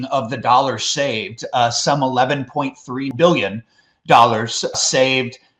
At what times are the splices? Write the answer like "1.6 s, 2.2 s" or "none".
3.1 s, 4.7 s